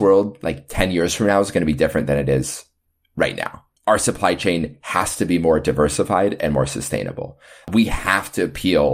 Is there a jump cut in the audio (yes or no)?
yes